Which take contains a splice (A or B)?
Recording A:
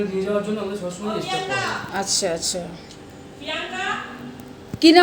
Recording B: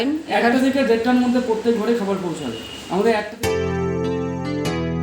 B